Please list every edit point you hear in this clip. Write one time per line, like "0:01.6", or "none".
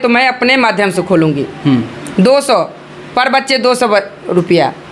none